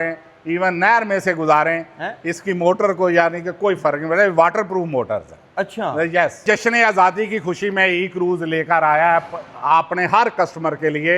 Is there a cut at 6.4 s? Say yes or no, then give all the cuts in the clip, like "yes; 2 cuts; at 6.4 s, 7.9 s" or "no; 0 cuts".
yes; 1 cut; at 6.4 s